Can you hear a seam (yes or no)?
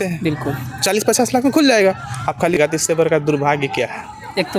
yes